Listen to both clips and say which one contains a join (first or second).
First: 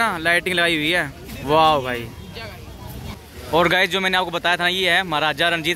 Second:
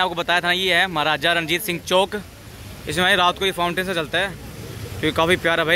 first